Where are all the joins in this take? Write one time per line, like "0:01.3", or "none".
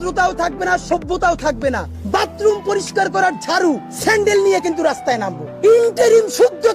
0:01.9
0:03.9
0:05.4

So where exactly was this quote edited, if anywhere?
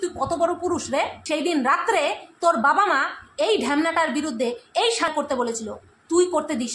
0:01.2
0:05.1

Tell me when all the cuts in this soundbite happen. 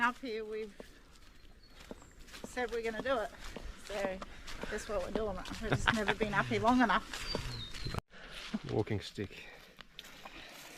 0:07.8

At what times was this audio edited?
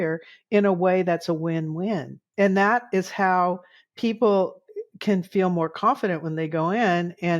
0:02.2

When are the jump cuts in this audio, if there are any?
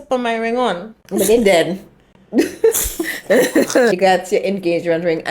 0:00.9
0:03.9

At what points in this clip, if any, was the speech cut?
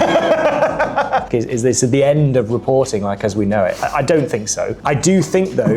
0:01.3
0:04.8

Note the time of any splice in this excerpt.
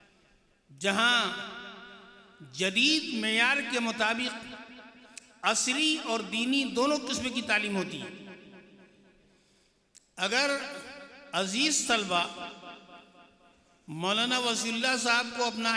none

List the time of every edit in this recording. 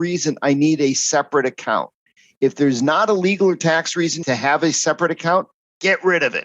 0:04.2

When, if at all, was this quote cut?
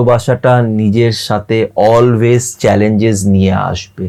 none

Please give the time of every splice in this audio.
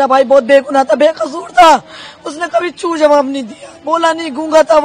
none

